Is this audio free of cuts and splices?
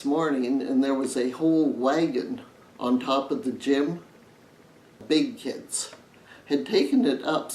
no; 1 cut; at 5.0 s

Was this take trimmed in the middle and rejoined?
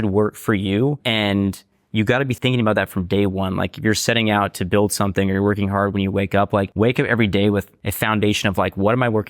yes; 4 cuts; at 1.0 s, 2.3 s, 6.7 s, 7.8 s

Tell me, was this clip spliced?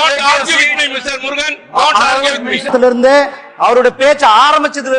yes; 1 cut; at 2.6 s

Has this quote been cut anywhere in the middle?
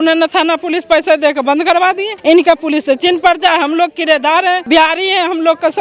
yes; 2 cuts; at 2.1 s, 4.6 s

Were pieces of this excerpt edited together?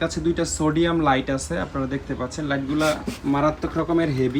no; 0 cuts

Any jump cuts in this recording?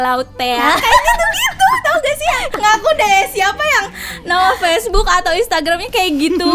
yes; 1 cut; at 2.5 s

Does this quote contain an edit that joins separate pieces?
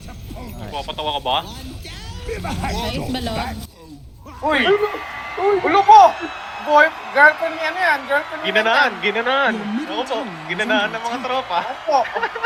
no; 0 cuts

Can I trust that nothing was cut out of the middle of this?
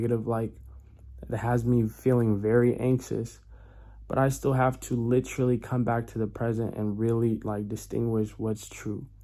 yes; 0 cuts

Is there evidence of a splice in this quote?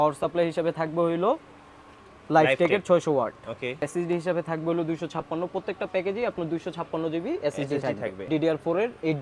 yes; 2 cuts; at 3.8 s, 8.2 s

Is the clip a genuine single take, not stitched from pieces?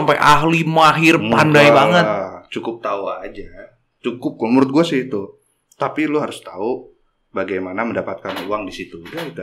yes; 0 cuts

